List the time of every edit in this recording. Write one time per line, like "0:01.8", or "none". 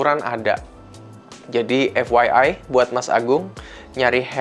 none